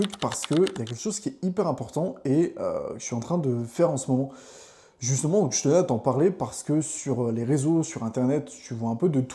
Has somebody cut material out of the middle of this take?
no; 0 cuts

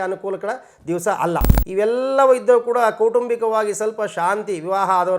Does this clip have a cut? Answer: yes; 1 cut; at 1.5 s

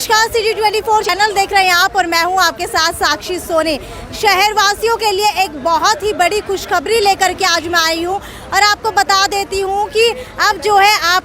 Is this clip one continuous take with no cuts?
no; 1 cut; at 1.1 s

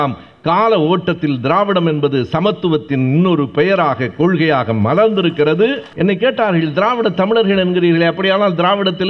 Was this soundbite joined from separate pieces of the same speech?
yes; 1 cut; at 5.9 s

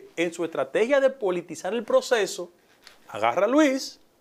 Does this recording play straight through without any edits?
yes; 0 cuts

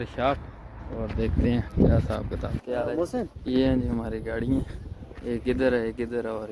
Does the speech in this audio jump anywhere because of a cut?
yes; 2 cuts; at 2.6 s, 3.4 s

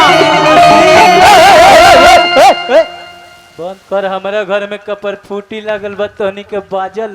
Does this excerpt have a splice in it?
no; 0 cuts

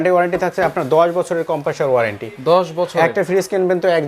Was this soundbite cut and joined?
no; 0 cuts

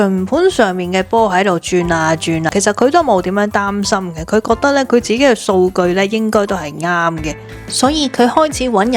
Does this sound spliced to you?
yes; 2 cuts; at 2.5 s, 7.4 s

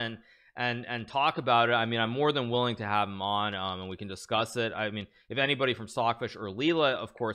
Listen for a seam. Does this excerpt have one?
no; 0 cuts

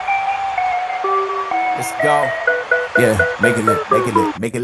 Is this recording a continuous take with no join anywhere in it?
yes; 0 cuts

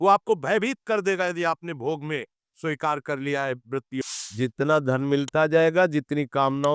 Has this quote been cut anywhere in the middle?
yes; 1 cut; at 4.0 s

